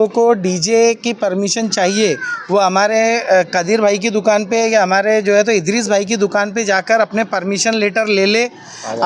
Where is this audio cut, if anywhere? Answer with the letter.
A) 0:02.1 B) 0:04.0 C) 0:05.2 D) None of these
D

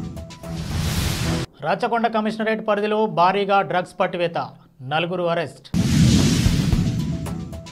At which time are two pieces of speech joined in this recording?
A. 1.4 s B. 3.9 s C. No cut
A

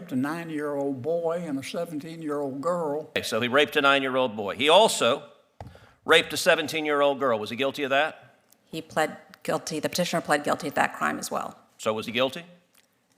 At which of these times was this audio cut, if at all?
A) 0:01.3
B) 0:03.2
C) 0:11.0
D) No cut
B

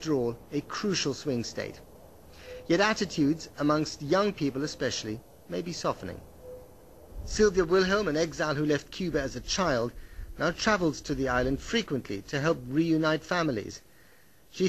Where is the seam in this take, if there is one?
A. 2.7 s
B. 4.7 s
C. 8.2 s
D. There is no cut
B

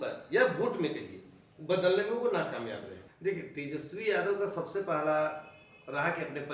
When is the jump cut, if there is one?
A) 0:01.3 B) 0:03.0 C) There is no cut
B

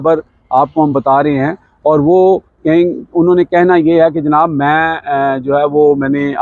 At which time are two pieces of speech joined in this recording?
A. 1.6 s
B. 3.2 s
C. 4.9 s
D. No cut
D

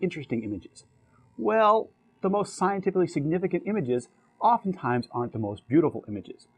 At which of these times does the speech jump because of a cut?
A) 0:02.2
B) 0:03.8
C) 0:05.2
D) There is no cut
B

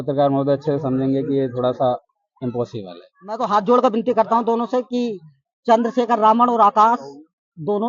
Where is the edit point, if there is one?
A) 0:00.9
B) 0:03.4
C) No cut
B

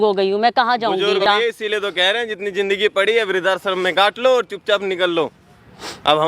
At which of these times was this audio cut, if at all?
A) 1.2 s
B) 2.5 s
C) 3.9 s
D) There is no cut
A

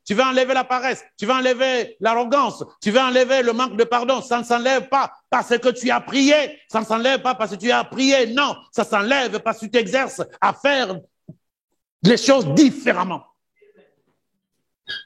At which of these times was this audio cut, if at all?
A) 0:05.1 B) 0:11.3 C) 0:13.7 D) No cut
C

